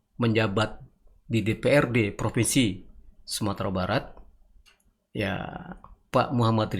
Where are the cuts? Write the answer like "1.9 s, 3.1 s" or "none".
none